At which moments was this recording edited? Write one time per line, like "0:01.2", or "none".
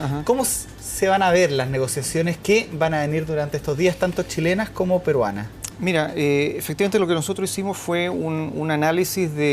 0:06.4